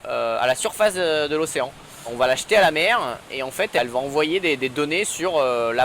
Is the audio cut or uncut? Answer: cut